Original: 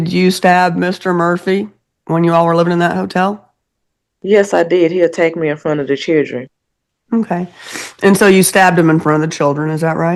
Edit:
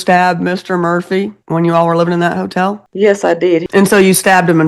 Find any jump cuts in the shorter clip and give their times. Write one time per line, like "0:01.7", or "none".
0:01.4
0:02.8
0:03.6